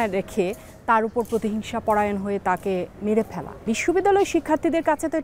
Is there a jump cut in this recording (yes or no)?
yes